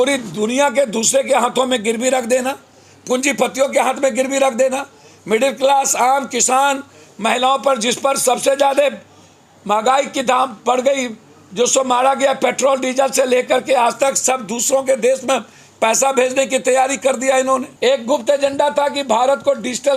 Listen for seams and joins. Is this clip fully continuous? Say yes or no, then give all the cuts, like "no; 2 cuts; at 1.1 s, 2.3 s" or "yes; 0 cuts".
no; 1 cut; at 17.7 s